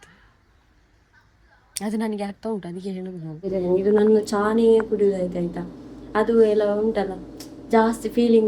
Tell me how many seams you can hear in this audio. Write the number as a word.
one